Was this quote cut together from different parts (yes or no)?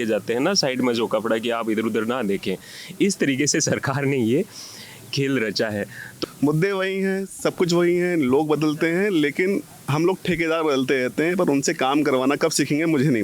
yes